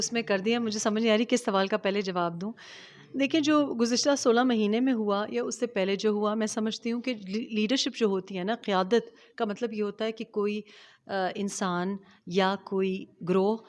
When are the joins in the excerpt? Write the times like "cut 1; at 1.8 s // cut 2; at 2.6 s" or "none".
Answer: none